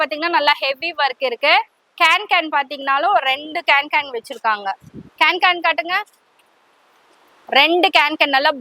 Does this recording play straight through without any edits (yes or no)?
yes